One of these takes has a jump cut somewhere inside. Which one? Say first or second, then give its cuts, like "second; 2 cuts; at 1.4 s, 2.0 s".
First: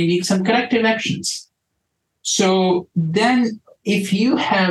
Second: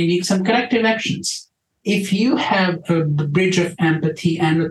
second; 1 cut; at 1.7 s